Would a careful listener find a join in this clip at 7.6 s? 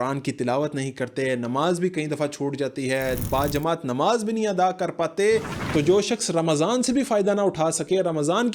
no; 1 cut; at 5.6 s

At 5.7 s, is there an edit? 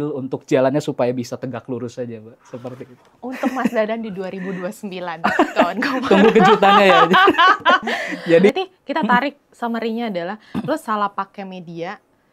no; 1 cut; at 8.5 s

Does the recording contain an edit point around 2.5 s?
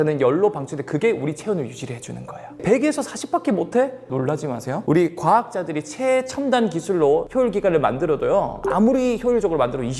yes; 3 cuts; at 2.5 s, 4.0 s, 8.6 s

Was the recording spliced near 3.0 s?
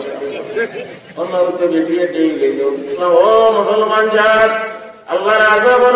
yes; 1 cut; at 3.0 s

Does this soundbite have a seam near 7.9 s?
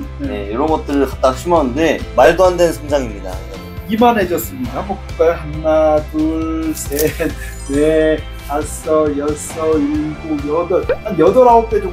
no; 0 cuts

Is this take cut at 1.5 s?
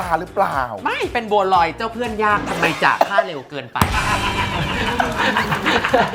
no; 0 cuts

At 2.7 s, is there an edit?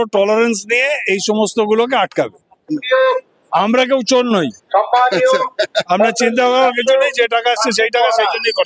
yes; 1 cut; at 2.7 s

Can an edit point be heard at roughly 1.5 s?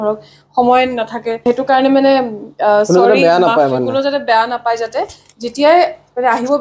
yes; 1 cut; at 1.5 s

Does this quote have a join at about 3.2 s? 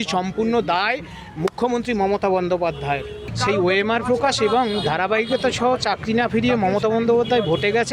yes; 1 cut; at 3.2 s

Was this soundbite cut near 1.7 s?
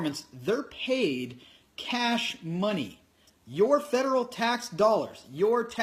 no; 0 cuts

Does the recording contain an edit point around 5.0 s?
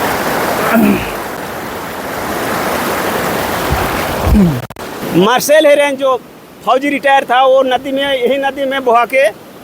yes; 1 cut; at 5.0 s

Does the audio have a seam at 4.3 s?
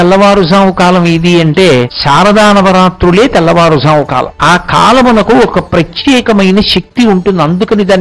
yes; 2 cuts; at 1.9 s, 4.3 s

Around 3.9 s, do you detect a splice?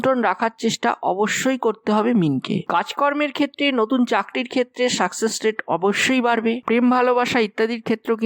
no; 1 cut; at 6.6 s

